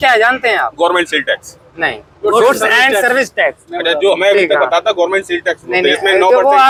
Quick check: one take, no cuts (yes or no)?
yes